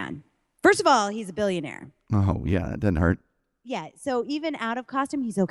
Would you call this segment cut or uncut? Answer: uncut